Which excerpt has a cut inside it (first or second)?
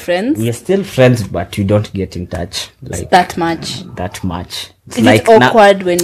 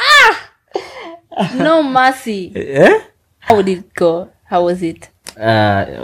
second